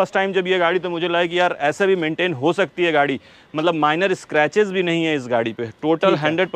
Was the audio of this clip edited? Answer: no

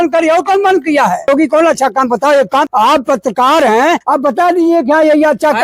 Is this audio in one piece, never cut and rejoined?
no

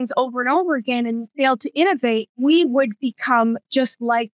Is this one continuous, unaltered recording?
no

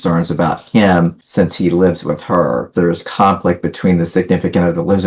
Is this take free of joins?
no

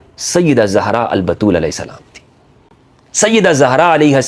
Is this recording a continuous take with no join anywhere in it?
yes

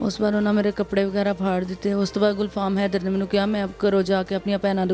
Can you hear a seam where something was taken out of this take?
no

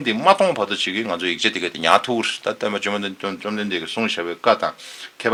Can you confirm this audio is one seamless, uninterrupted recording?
yes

